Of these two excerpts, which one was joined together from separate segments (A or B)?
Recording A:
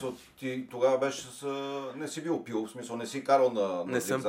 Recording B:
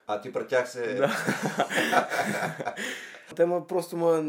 B